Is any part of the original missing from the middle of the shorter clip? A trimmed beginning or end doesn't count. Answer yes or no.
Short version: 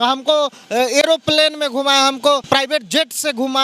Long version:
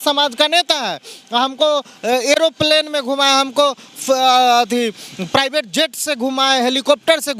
yes